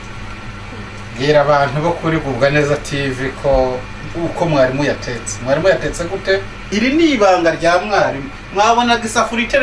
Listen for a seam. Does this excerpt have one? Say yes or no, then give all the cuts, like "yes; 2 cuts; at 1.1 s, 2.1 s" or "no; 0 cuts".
yes; 1 cut; at 6.7 s